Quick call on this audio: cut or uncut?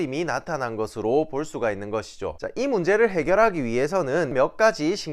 cut